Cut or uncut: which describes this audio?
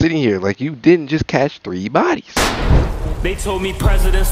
cut